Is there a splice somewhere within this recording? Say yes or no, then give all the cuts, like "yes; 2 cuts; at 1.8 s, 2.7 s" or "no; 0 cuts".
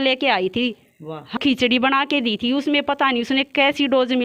yes; 1 cut; at 1.4 s